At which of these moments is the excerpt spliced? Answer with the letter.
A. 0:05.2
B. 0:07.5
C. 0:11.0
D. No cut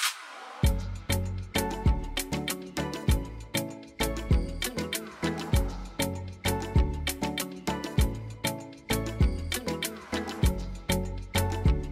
D